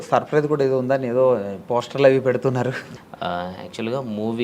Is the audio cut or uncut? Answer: cut